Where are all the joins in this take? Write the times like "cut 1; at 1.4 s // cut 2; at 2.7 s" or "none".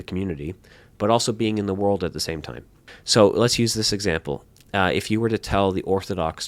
cut 1; at 2.9 s